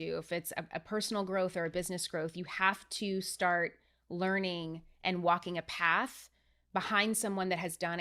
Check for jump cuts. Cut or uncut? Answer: uncut